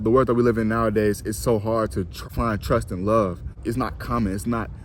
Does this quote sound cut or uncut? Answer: cut